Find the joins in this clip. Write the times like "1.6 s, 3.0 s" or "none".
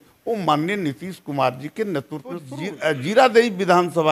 2.5 s